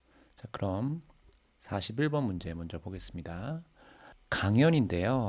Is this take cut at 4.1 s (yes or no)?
yes